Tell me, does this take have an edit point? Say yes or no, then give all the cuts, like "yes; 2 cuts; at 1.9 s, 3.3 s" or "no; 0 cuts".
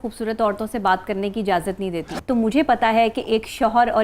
yes; 1 cut; at 2.1 s